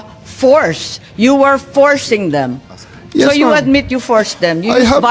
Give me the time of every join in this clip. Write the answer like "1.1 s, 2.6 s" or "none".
none